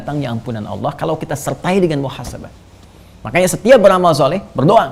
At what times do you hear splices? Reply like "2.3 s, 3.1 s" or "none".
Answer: none